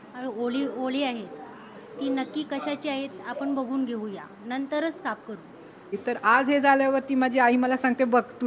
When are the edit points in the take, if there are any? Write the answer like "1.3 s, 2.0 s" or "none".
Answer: 5.9 s